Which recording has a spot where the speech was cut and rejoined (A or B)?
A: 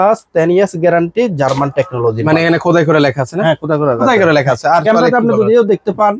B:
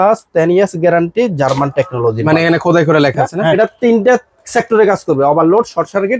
B